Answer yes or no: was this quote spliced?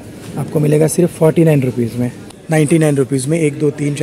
yes